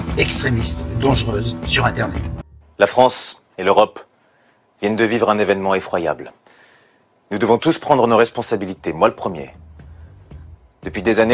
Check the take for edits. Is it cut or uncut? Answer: cut